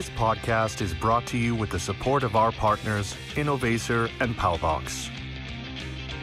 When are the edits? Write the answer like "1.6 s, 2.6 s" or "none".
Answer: 4.9 s